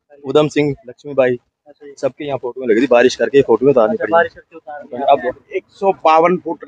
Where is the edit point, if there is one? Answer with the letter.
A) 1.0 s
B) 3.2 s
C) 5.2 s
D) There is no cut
C